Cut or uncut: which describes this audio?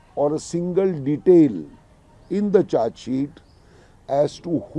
uncut